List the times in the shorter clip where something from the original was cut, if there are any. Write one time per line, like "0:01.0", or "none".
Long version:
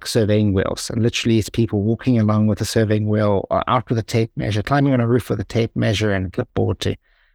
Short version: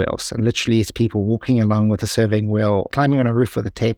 0:02.9